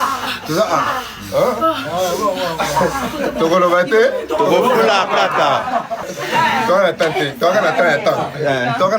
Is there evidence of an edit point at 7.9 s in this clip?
no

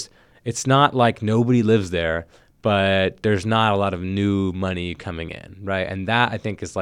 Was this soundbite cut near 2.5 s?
no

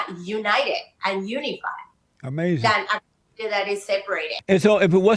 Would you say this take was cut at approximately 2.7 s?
no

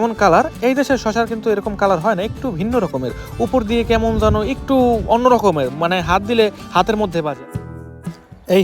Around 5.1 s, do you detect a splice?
no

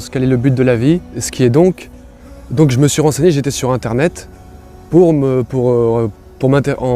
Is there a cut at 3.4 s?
no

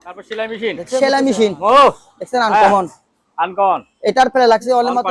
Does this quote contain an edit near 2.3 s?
no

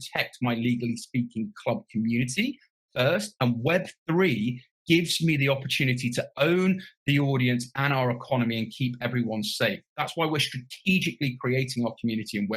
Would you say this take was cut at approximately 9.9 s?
yes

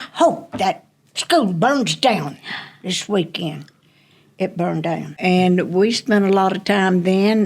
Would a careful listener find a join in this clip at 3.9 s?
no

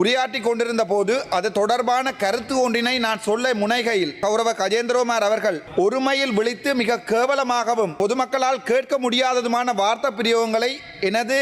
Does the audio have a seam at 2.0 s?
no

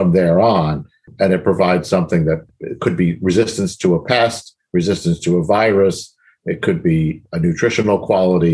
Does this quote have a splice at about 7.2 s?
yes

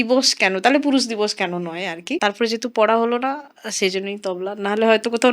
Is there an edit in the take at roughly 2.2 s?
yes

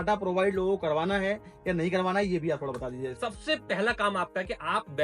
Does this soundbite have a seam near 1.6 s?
no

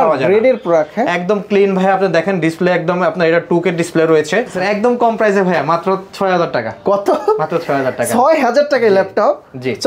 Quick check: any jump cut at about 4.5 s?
yes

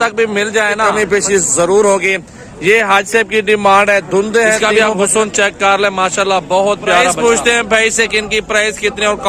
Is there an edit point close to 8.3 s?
no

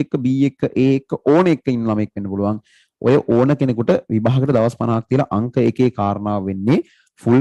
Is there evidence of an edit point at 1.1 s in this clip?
no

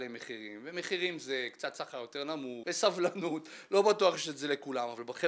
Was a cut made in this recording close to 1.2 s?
no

